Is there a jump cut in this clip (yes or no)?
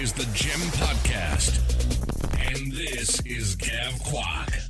no